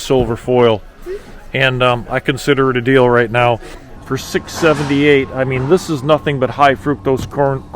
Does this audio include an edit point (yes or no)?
yes